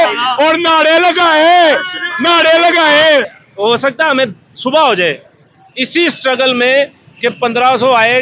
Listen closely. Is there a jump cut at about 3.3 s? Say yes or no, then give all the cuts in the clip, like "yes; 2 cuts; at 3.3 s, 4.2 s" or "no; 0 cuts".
yes; 1 cut; at 3.3 s